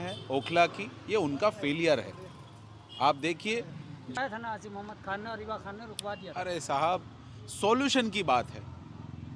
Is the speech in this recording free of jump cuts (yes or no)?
no